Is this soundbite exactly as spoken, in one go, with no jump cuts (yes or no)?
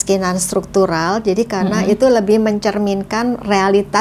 yes